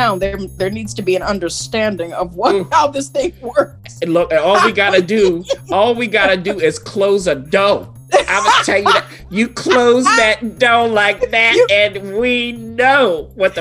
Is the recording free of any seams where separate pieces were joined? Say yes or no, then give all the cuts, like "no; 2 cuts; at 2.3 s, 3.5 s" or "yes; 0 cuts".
yes; 0 cuts